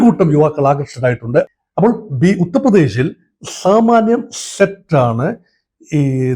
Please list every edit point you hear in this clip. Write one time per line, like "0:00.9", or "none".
0:01.5